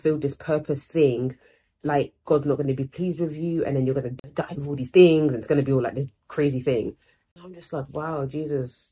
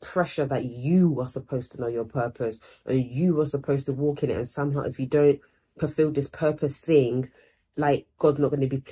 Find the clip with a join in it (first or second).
first